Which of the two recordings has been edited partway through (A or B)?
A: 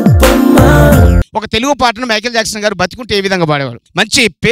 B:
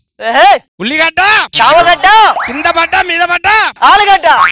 A